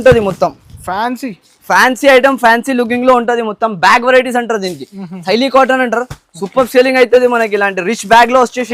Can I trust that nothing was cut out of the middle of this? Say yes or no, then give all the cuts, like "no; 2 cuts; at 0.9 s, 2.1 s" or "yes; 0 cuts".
yes; 0 cuts